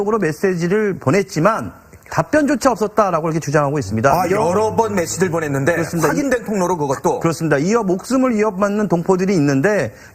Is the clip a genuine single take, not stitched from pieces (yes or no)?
no